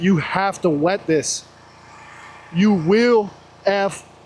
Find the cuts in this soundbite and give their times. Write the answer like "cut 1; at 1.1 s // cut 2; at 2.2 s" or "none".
none